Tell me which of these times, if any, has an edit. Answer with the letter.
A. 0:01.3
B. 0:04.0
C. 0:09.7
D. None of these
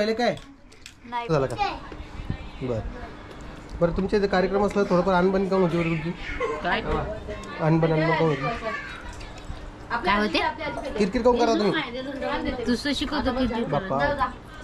A